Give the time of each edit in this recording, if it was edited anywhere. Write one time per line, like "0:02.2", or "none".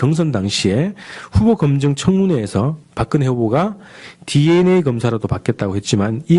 0:05.0